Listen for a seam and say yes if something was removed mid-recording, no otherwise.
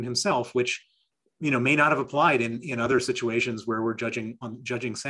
no